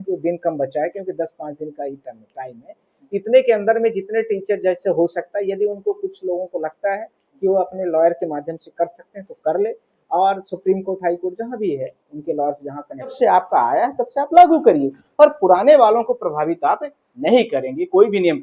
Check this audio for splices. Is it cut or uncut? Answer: cut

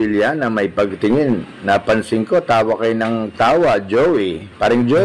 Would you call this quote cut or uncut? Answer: uncut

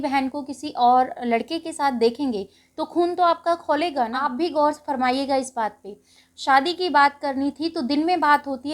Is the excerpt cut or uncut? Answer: cut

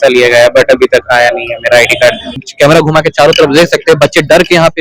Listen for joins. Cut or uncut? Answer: cut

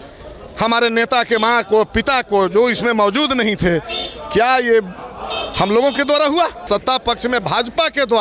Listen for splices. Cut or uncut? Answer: cut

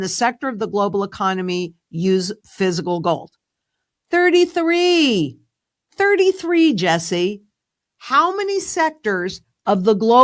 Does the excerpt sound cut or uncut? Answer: uncut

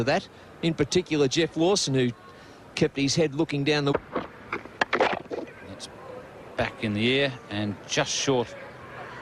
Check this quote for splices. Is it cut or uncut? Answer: cut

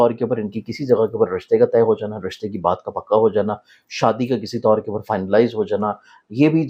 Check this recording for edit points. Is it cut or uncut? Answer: uncut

